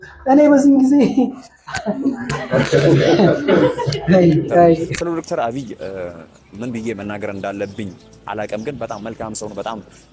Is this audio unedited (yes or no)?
no